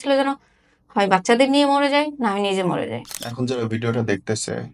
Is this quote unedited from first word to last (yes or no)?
no